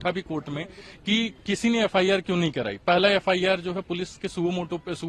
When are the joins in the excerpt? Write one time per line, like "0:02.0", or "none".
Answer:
none